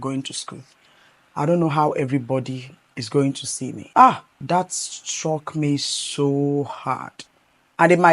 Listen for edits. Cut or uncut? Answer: cut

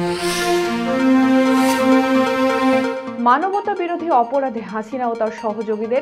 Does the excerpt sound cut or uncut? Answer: uncut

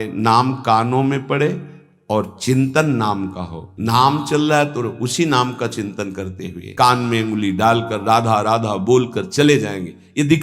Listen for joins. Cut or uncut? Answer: cut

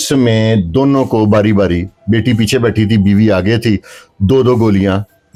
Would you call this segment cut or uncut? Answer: uncut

